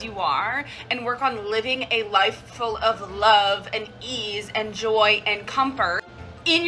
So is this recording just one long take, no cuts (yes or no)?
yes